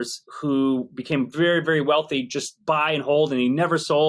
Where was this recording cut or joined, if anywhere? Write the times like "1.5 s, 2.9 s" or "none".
none